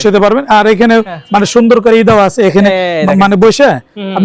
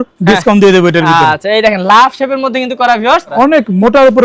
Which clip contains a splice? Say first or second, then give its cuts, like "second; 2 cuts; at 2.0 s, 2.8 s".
second; 1 cut; at 3.3 s